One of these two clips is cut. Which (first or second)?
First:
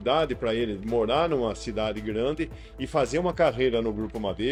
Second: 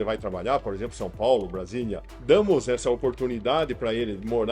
second